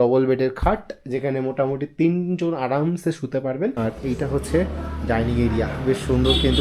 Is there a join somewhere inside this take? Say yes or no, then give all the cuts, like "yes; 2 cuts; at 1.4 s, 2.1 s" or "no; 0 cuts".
yes; 1 cut; at 3.8 s